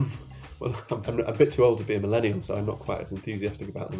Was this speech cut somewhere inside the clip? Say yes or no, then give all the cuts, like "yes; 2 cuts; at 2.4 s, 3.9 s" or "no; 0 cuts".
yes; 1 cut; at 1.0 s